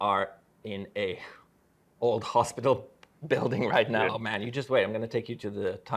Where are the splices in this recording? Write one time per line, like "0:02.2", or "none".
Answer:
0:04.1